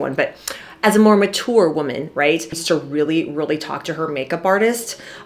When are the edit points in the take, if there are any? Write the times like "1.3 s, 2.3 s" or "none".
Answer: 2.5 s